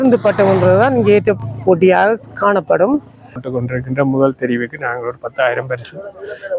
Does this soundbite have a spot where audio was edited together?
yes; 1 cut; at 3.4 s

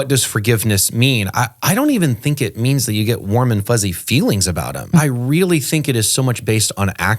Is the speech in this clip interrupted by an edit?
yes; 1 cut; at 5.0 s

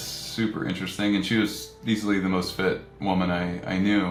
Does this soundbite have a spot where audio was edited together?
no; 0 cuts

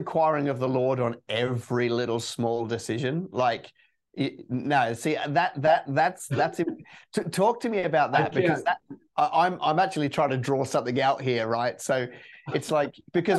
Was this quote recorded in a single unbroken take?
yes; 0 cuts

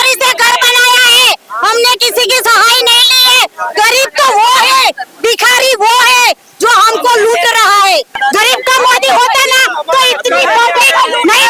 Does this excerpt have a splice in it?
yes; 1 cut; at 8.1 s

